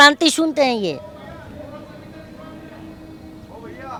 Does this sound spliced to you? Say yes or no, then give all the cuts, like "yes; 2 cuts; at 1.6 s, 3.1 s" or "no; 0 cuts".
no; 0 cuts